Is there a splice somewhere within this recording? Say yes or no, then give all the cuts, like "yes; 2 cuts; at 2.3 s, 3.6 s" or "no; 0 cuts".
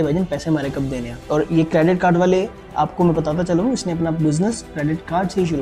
no; 0 cuts